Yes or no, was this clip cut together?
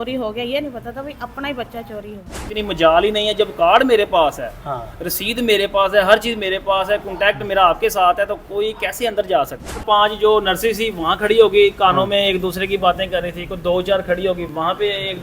yes